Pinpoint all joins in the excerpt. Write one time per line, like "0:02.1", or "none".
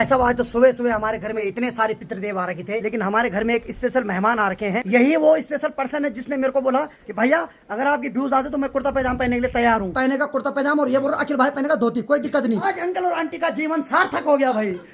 0:01.4
0:02.8
0:04.8
0:07.0
0:09.9
0:12.6